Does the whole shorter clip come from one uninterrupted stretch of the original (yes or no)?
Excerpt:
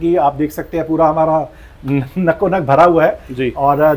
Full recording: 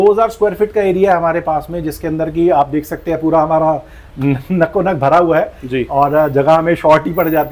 yes